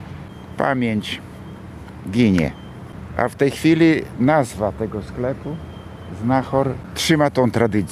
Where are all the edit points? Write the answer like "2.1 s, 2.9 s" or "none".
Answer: 6.8 s